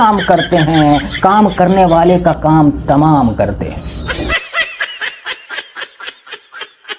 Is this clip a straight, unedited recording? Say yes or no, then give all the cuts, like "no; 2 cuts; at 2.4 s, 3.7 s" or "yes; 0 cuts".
yes; 0 cuts